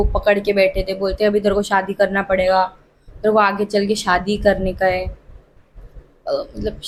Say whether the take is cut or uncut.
uncut